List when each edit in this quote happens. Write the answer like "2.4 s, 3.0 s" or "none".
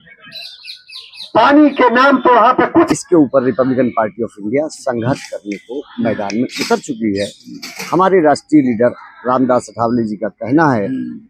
2.9 s